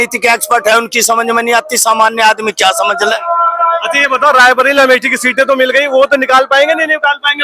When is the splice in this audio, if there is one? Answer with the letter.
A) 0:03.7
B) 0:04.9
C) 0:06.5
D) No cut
D